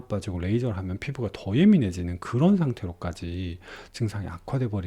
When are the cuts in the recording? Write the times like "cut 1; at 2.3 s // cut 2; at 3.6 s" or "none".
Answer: none